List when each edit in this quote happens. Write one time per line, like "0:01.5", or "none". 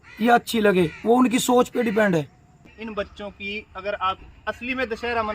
0:02.7